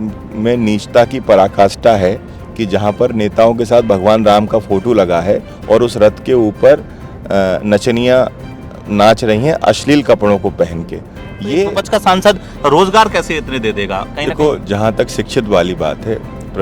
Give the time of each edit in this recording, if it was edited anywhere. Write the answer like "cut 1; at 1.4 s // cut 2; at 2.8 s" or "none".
cut 1; at 11.8 s